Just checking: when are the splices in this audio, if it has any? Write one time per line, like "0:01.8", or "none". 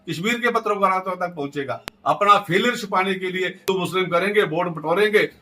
0:03.7